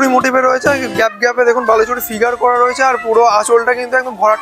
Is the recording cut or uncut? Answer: uncut